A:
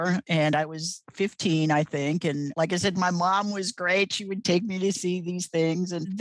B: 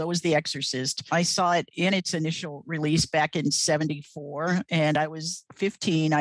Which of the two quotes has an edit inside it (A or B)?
B